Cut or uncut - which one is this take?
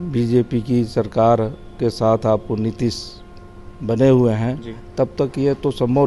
uncut